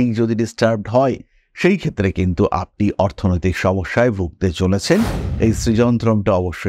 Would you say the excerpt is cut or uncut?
cut